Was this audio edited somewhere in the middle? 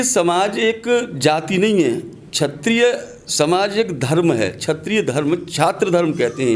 no; 0 cuts

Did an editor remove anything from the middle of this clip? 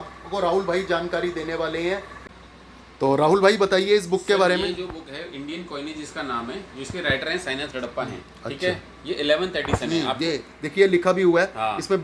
yes; 1 cut; at 2.1 s

